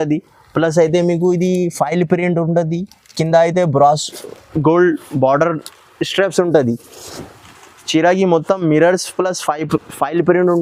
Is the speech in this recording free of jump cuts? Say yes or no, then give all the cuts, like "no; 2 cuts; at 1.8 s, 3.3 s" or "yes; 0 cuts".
yes; 0 cuts